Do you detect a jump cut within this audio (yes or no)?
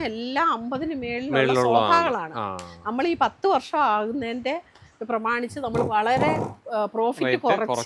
no